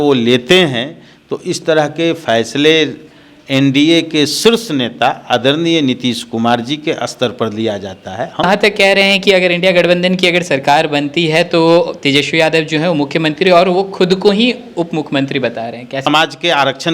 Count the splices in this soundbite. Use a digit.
2